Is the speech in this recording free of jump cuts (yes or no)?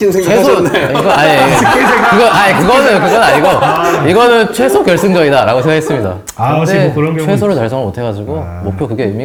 yes